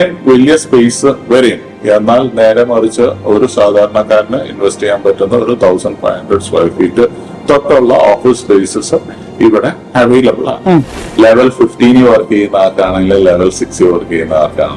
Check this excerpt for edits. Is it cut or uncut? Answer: cut